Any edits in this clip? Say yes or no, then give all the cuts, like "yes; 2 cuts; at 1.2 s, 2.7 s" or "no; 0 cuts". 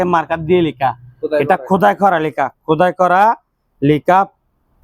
no; 0 cuts